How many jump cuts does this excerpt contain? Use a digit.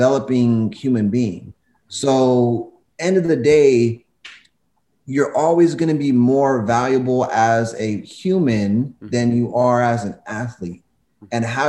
1